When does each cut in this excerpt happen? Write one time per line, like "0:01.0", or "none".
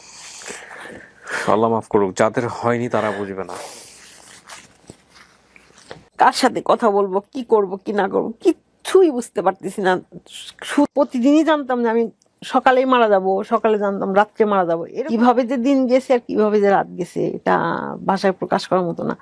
0:10.9
0:14.9